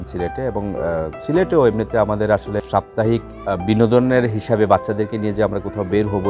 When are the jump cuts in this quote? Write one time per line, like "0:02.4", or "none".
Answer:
0:02.6
0:03.3